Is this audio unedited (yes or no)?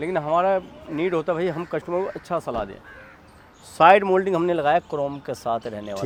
yes